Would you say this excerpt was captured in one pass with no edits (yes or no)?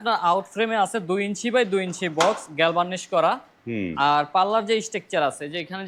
yes